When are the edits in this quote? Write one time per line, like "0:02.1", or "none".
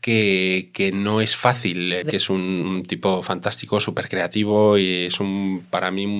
0:02.1